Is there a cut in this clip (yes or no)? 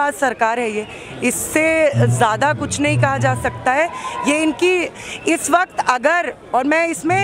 no